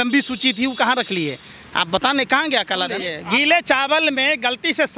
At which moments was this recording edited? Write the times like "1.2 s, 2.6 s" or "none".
3.1 s